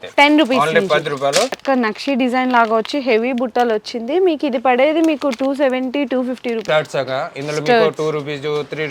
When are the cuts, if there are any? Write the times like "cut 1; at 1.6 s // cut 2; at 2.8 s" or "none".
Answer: cut 1; at 1.6 s // cut 2; at 6.6 s

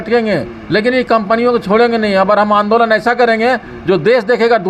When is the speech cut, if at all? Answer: none

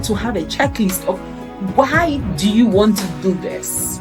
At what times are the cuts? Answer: none

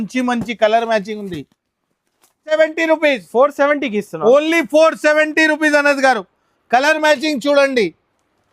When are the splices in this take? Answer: cut 1; at 2.5 s

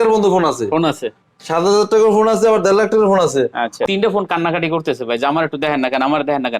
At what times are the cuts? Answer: cut 1; at 3.8 s

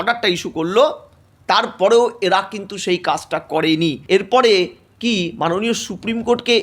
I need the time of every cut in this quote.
cut 1; at 4.0 s

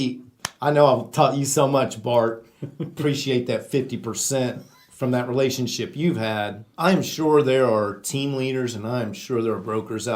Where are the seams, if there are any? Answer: cut 1; at 6.6 s

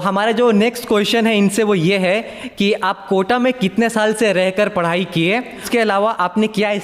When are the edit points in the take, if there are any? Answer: cut 1; at 5.7 s

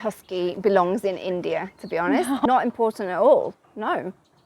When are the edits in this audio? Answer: cut 1; at 2.4 s

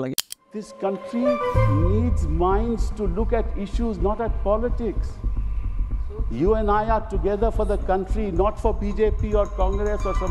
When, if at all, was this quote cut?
none

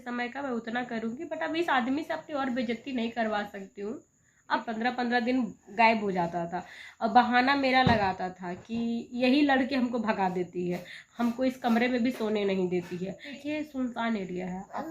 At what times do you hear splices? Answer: cut 1; at 4.6 s // cut 2; at 13.4 s

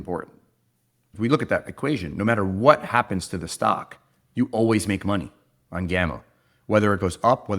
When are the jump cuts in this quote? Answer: cut 1; at 1.1 s

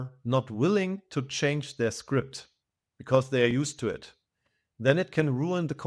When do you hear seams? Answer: none

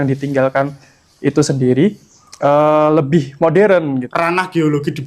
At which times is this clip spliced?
cut 1; at 4.1 s

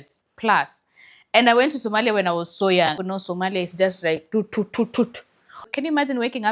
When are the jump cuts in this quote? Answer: cut 1; at 3.0 s // cut 2; at 5.7 s

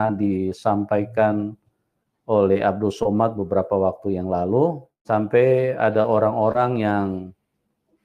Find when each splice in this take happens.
cut 1; at 5.0 s

